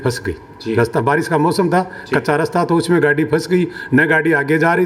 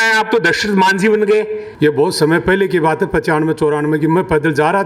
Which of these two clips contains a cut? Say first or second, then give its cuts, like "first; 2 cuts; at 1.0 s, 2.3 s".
second; 1 cut; at 1.6 s